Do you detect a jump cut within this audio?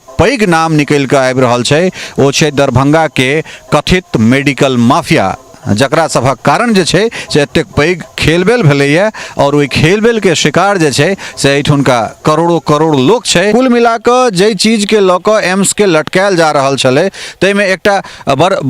yes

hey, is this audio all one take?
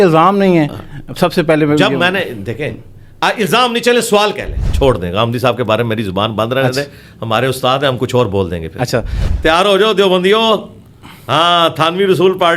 no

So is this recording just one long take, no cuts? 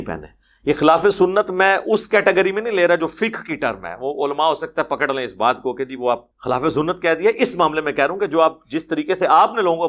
no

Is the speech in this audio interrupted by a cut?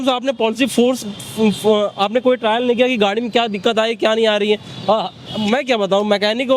no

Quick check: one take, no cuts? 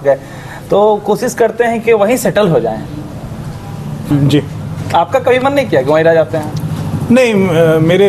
no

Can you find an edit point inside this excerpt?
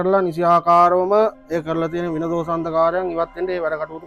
no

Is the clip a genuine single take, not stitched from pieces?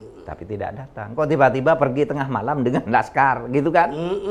yes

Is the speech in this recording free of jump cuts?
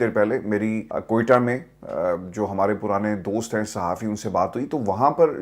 no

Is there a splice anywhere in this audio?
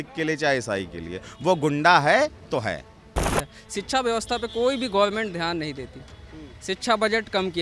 yes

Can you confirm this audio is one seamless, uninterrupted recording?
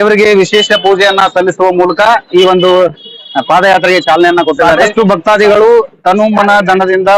no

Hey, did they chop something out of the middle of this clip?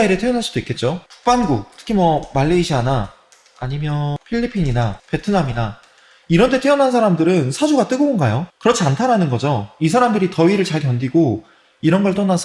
yes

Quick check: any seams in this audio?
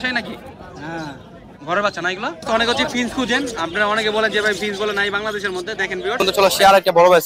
yes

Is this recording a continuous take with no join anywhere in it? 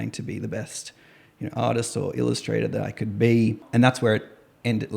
no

